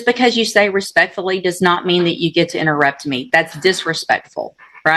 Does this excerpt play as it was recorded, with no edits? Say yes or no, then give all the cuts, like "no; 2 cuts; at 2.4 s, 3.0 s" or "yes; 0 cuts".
yes; 0 cuts